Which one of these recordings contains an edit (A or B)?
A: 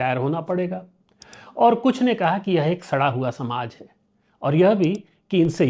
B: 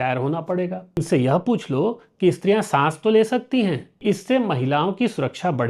B